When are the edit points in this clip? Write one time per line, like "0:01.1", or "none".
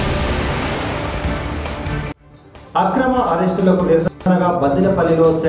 0:01.1